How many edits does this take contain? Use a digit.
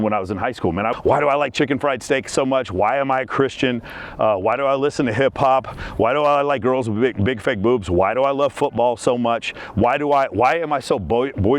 1